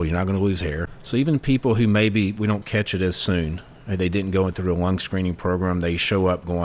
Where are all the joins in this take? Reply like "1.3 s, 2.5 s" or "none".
0.9 s